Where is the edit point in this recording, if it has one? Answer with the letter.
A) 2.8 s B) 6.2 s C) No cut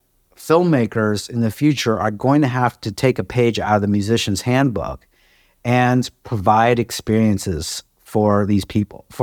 C